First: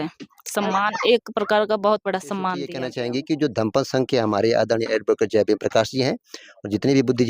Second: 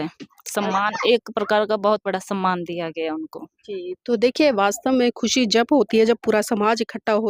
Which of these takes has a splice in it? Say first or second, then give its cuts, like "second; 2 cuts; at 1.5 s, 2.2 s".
first; 1 cut; at 2.8 s